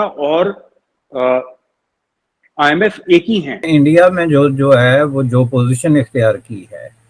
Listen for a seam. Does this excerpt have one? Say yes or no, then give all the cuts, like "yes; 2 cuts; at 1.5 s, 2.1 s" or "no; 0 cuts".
yes; 1 cut; at 3.6 s